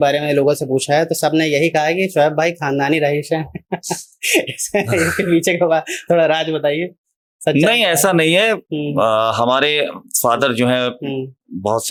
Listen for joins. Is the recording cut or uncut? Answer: uncut